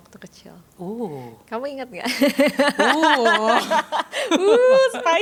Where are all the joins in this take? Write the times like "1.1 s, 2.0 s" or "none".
none